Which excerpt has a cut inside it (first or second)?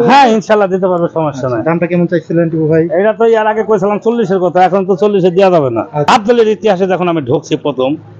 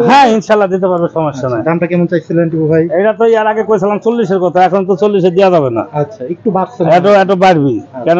first